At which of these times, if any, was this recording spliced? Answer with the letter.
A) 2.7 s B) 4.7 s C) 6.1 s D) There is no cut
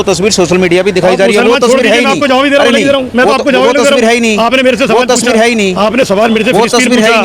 D